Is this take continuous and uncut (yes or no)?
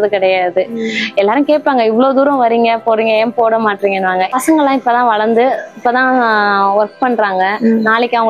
no